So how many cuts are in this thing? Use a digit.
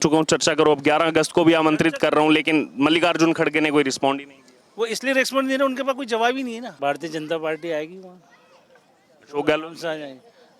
1